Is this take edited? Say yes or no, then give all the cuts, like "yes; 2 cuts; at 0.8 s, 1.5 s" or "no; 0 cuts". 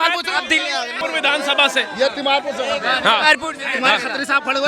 no; 0 cuts